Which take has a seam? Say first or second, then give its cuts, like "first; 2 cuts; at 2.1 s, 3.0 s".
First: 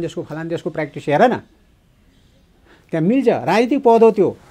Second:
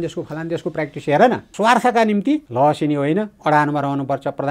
second; 1 cut; at 1.5 s